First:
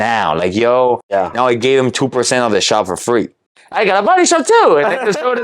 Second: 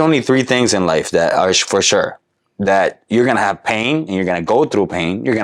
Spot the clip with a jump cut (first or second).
first